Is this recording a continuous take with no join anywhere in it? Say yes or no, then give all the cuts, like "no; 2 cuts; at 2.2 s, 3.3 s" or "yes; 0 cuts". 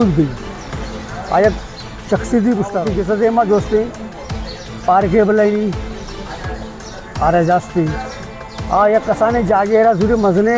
no; 1 cut; at 2.9 s